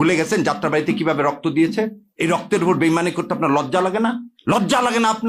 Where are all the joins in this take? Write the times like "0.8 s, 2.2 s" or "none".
2.0 s, 4.3 s